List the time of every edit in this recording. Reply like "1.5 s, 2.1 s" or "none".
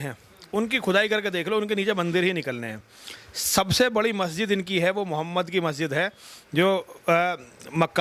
none

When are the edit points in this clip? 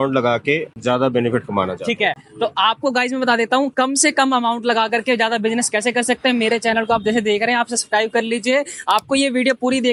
none

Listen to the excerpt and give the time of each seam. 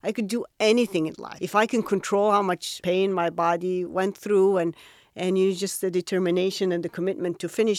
1.3 s, 2.7 s

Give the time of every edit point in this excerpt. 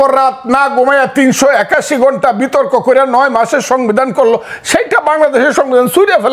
none

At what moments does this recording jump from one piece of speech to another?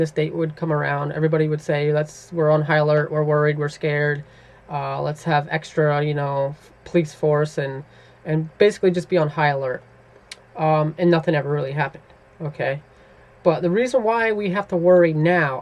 1.5 s

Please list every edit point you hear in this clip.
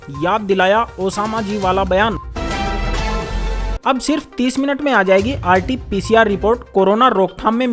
2.2 s

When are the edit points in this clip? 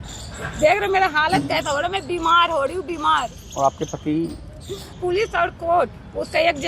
5.0 s

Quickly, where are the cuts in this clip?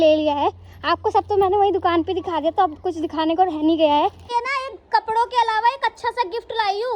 4.2 s

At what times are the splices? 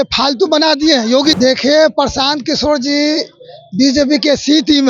1.4 s

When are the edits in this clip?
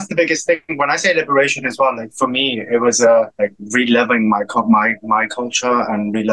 none

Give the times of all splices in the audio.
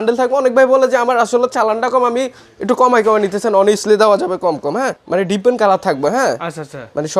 5.0 s

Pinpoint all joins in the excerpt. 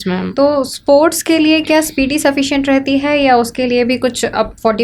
none

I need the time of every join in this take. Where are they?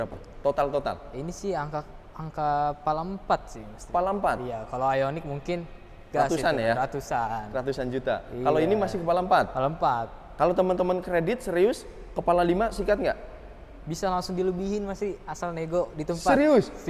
none

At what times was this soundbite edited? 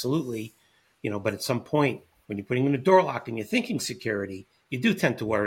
none

